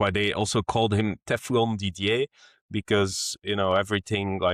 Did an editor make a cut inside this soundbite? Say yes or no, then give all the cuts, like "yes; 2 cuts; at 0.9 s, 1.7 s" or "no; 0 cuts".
no; 0 cuts